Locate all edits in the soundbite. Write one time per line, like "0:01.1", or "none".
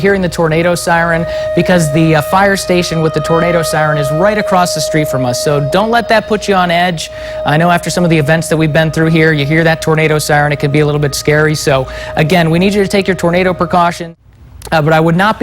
0:14.0